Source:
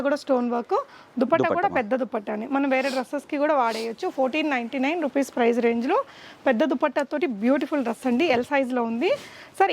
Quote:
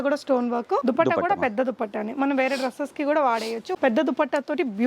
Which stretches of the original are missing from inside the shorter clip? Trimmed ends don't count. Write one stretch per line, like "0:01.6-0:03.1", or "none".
0:00.8-0:01.1
0:04.0-0:06.3

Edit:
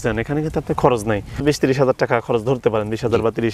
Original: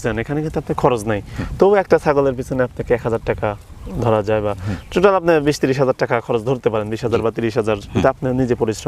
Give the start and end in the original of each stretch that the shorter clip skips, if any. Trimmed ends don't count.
0:01.4-0:05.4

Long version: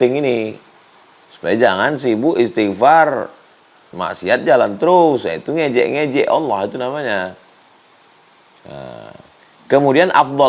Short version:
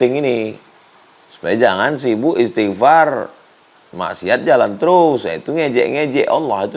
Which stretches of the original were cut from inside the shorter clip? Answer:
none

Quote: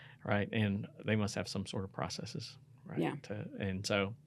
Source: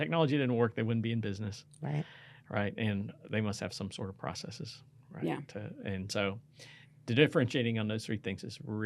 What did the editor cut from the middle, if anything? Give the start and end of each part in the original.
none

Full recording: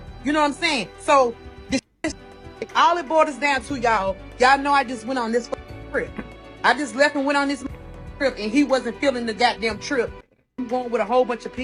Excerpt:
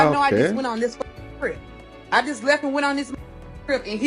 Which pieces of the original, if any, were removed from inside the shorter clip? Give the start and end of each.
none

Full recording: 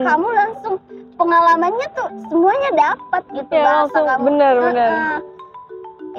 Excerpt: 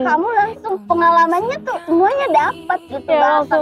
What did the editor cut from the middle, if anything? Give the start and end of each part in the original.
0:00.8-0:01.1
0:01.8-0:02.0

